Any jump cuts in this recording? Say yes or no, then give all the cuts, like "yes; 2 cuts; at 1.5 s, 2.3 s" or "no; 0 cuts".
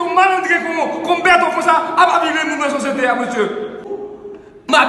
yes; 1 cut; at 3.9 s